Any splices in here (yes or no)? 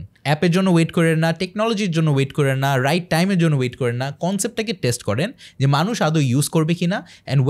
no